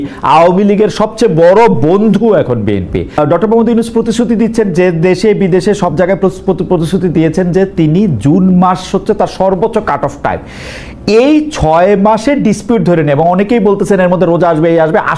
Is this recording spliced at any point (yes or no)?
yes